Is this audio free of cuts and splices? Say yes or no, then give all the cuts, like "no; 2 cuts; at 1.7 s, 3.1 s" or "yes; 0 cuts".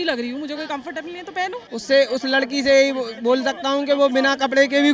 no; 1 cut; at 1.7 s